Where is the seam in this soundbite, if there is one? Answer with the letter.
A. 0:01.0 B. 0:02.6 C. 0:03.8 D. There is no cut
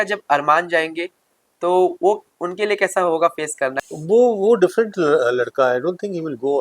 C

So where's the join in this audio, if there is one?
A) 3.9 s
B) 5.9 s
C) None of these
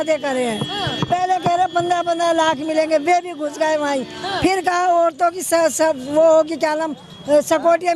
C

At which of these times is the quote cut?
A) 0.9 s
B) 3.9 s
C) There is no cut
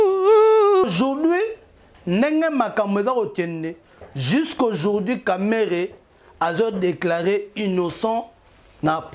A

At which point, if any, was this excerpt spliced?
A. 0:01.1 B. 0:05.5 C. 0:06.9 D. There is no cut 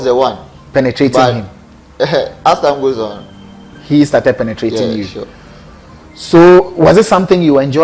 D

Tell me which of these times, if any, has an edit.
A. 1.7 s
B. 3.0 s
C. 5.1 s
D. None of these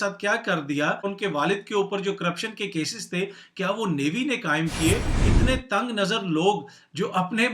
C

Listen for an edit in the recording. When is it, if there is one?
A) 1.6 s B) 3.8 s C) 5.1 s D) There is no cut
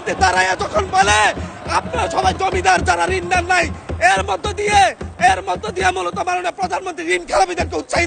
D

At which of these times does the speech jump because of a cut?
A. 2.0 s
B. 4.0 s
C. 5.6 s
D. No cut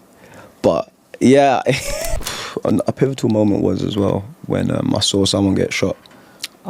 A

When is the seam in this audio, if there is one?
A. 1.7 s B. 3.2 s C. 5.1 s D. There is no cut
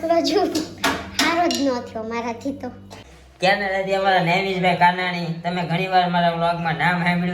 B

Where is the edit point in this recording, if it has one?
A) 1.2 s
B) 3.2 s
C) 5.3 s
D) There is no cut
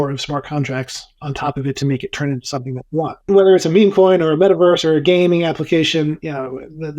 B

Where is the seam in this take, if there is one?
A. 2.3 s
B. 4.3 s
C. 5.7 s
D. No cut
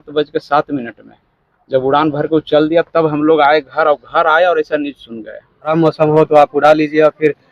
C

